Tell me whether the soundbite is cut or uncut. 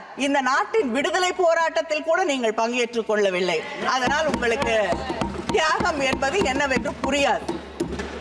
uncut